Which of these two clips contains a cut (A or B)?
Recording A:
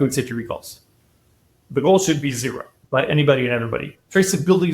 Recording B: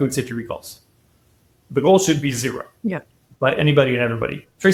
A